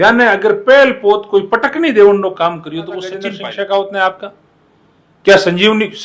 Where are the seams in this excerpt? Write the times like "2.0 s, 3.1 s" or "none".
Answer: 3.3 s